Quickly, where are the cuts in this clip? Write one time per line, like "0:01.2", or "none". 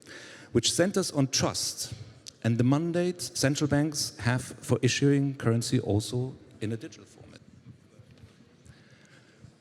0:07.4